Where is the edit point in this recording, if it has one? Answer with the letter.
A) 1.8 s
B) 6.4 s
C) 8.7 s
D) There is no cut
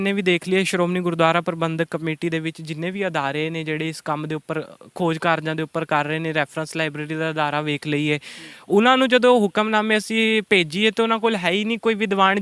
D